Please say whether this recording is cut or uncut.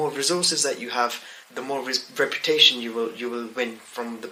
uncut